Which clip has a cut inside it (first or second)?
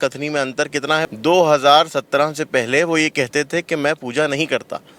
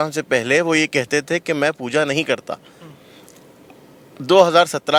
first